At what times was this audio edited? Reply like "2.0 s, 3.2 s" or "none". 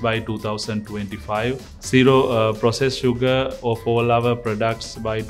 3.5 s

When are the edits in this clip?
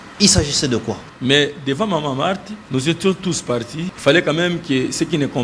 1.1 s, 2.5 s, 3.8 s

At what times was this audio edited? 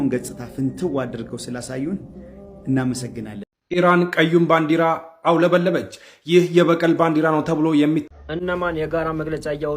3.5 s, 8.0 s

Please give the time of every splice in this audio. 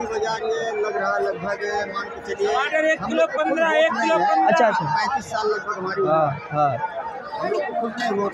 none

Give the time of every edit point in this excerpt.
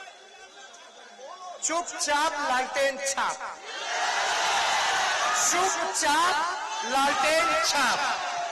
none

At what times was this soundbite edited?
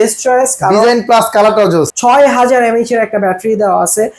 1.9 s

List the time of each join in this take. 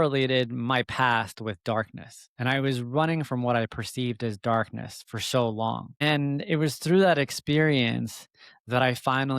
6.0 s

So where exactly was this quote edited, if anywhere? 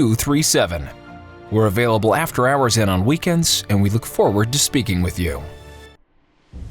5.4 s

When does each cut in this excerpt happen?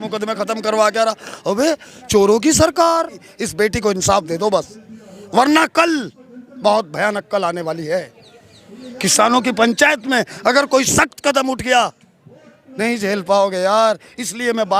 3.2 s

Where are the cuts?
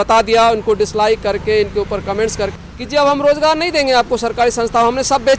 2.5 s

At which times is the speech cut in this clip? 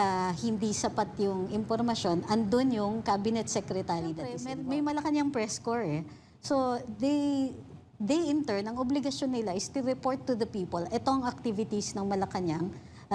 4.4 s

